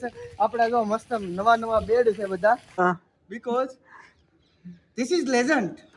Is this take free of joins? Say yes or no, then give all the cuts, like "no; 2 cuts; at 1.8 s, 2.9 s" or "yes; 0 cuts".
no; 1 cut; at 2.8 s